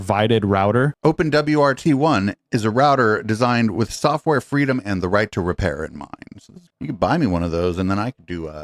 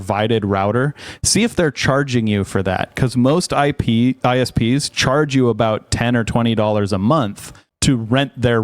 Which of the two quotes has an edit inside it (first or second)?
first